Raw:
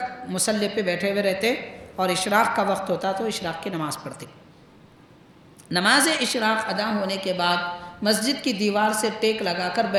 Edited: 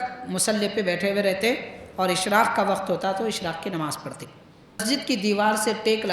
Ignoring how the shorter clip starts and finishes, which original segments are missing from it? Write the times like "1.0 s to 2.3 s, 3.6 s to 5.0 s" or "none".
4.8 s to 8.2 s